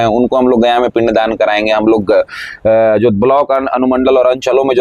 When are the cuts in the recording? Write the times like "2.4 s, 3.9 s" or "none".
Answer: none